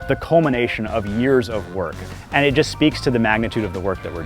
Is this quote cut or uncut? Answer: cut